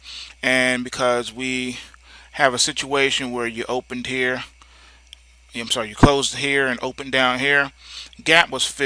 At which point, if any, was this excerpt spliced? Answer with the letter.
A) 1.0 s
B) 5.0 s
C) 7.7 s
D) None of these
D